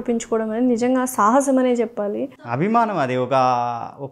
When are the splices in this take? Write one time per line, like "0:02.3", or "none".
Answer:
none